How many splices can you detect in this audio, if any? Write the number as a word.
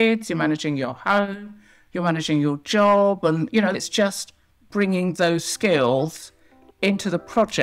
one